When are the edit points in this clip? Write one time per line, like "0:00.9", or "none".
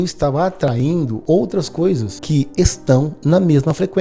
0:01.2
0:02.1